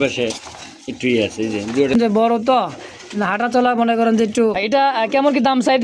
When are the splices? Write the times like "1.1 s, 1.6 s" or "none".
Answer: 1.9 s, 4.6 s